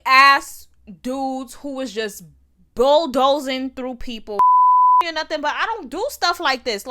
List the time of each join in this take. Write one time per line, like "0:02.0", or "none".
0:04.3
0:05.0